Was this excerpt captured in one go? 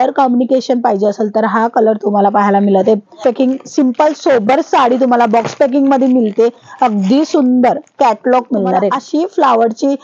no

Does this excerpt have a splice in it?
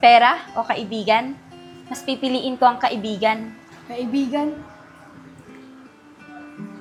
no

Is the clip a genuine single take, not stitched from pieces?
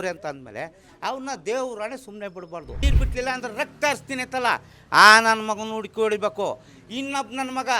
no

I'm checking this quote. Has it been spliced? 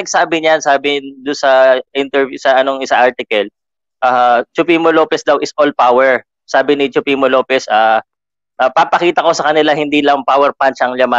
no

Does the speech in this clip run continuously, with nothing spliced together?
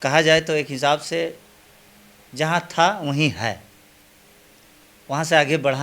yes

